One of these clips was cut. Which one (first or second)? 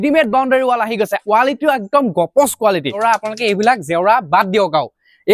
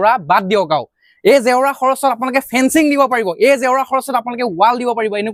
first